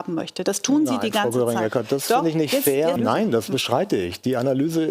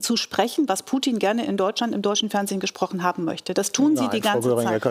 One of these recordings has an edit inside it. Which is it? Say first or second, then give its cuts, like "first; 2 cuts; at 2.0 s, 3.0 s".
first; 1 cut; at 3.0 s